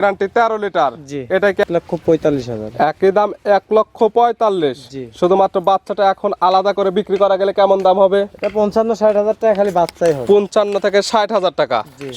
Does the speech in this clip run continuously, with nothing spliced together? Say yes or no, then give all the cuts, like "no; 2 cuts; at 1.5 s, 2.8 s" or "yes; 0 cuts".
no; 1 cut; at 1.6 s